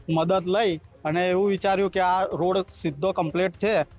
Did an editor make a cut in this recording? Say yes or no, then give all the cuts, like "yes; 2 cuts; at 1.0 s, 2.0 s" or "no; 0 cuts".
no; 0 cuts